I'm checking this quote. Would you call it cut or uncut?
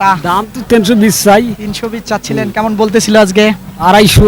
uncut